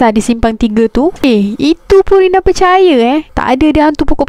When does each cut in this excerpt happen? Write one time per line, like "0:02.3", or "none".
0:01.2
0:03.3